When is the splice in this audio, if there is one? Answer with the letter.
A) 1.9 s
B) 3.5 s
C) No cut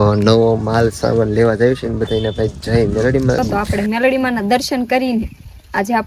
B